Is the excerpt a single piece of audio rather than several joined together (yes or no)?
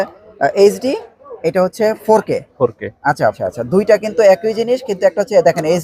no